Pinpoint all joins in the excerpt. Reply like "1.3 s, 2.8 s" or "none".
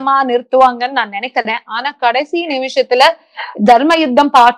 none